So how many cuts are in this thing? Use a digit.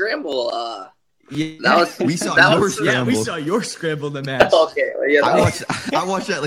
0